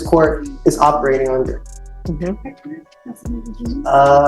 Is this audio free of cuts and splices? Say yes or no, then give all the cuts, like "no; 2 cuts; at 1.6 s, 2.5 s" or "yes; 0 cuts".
yes; 0 cuts